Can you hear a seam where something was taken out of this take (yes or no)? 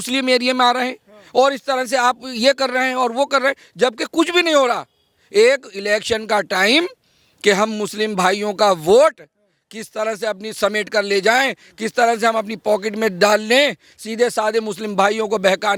no